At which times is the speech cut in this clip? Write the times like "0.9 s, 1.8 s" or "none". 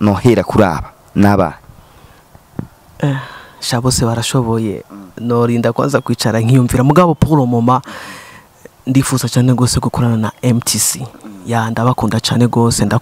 none